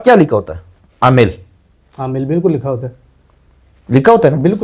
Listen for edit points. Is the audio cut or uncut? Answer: uncut